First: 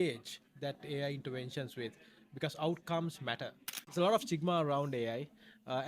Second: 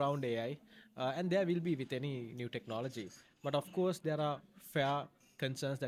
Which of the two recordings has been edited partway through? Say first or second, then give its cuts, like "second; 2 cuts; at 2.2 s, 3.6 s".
first; 1 cut; at 3.8 s